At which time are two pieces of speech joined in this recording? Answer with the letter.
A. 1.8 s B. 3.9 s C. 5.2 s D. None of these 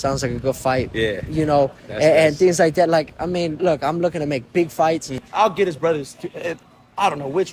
C